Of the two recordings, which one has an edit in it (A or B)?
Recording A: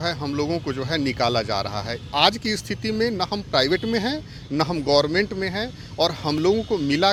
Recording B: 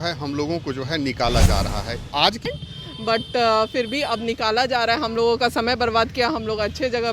B